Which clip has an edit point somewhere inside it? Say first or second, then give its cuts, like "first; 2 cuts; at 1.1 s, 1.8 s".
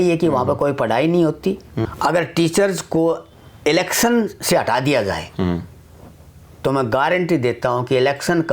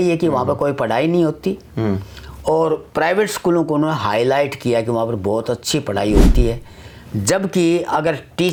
first; 1 cut; at 1.8 s